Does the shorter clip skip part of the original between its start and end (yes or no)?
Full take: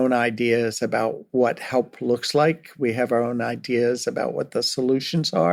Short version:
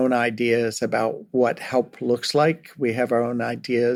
no